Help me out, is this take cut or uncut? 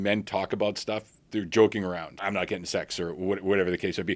cut